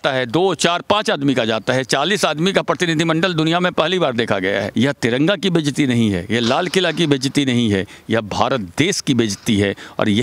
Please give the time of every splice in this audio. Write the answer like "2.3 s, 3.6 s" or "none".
4.7 s